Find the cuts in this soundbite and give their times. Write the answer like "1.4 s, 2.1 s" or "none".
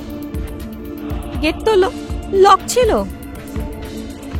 1.4 s, 3.4 s